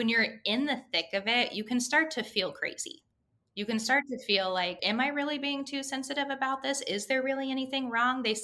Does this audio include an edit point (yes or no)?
yes